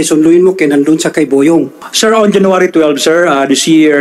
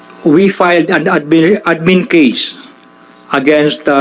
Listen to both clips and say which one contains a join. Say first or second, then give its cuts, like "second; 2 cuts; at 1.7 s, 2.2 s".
first; 1 cut; at 1.8 s